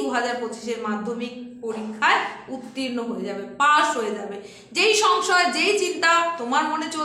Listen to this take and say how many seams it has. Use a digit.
0